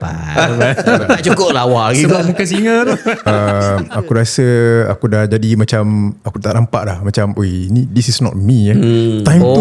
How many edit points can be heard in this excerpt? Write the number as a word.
one